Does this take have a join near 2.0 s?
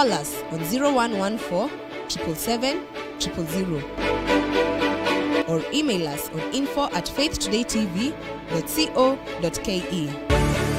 no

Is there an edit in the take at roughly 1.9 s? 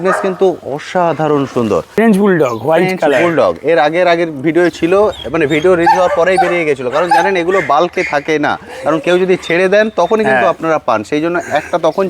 yes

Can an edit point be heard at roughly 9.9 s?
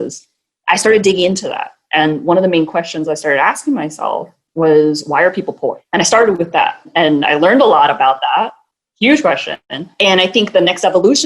yes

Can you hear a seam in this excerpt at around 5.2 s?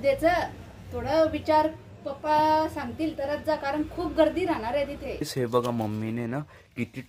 yes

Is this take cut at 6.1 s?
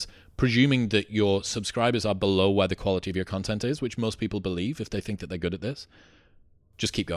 no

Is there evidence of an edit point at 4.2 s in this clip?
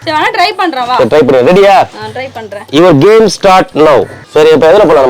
yes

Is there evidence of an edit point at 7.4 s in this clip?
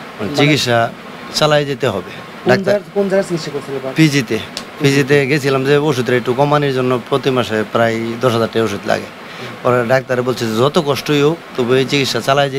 no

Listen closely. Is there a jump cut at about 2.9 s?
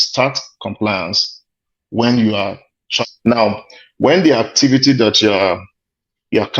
yes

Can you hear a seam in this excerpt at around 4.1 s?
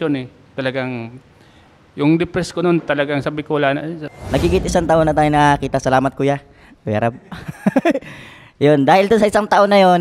yes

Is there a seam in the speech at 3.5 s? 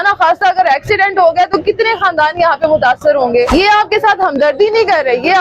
yes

